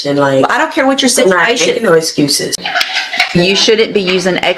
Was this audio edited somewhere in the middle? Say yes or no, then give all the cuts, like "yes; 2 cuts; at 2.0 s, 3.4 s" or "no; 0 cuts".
yes; 1 cut; at 2.6 s